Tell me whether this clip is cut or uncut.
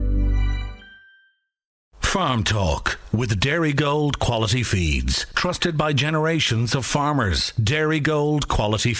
cut